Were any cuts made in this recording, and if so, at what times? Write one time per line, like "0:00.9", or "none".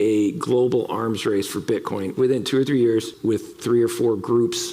0:02.1
0:03.1